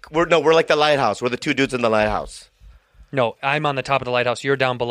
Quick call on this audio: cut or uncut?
uncut